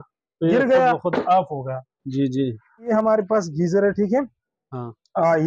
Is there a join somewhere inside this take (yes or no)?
yes